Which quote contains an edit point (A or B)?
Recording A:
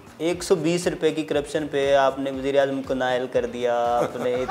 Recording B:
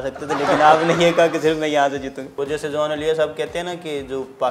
B